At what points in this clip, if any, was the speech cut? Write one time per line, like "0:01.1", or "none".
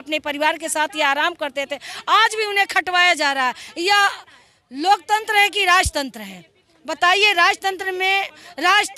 none